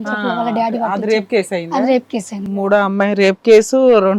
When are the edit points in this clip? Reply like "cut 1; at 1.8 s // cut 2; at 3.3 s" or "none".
cut 1; at 2.4 s